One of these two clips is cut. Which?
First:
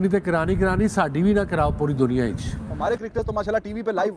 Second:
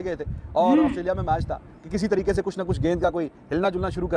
first; 1 cut; at 2.7 s

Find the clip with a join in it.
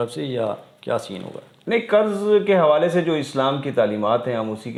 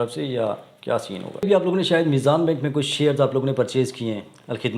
second; 1 cut; at 1.4 s

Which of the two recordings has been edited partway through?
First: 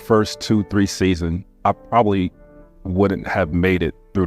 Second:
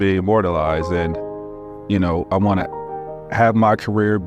first; 1 cut; at 1.5 s

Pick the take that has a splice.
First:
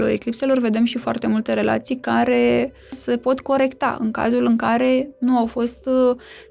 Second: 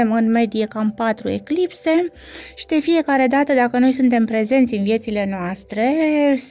first; 1 cut; at 3.0 s

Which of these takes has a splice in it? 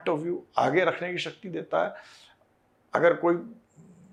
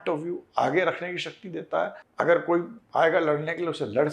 second; 2 cuts; at 2.0 s, 2.8 s

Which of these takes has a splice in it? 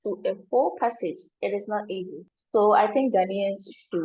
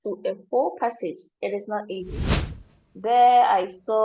second; 1 cut; at 2.3 s

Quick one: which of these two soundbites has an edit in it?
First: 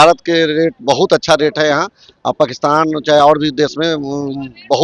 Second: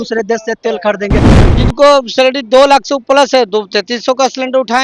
second; 1 cut; at 1.3 s

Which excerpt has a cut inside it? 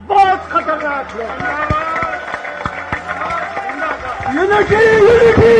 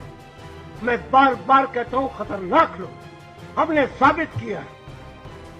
second; 1 cut; at 4.7 s

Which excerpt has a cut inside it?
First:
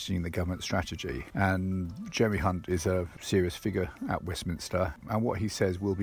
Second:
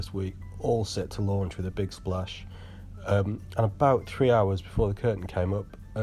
first; 2 cuts; at 1.2 s, 5.0 s

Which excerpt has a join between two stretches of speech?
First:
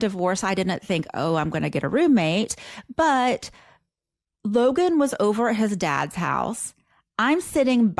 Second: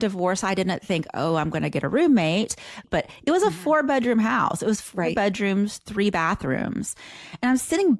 second; 1 cut; at 2.8 s

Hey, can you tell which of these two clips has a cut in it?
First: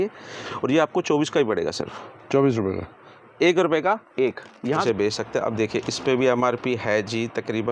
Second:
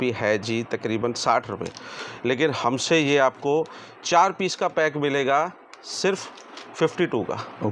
first; 1 cut; at 4.8 s

